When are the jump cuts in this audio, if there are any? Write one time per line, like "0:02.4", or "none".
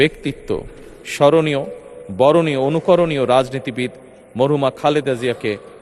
none